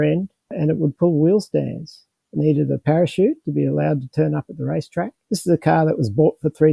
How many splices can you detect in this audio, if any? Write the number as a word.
one